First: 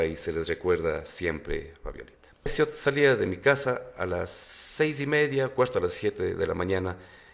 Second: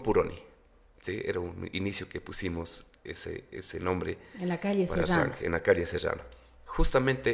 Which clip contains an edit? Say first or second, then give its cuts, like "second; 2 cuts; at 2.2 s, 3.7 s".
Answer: first; 1 cut; at 2.5 s